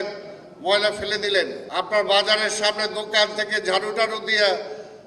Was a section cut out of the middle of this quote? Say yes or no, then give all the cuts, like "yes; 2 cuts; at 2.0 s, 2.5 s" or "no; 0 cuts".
yes; 1 cut; at 1.6 s